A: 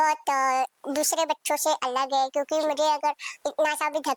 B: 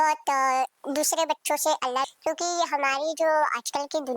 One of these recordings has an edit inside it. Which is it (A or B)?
B